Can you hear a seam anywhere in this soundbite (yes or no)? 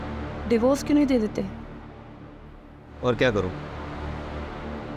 no